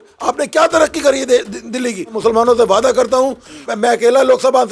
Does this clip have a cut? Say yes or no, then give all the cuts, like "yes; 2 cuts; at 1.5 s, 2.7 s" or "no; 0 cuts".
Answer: yes; 2 cuts; at 2.1 s, 3.7 s